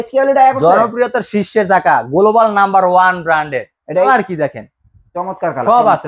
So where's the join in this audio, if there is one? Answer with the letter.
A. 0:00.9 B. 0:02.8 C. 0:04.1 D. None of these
C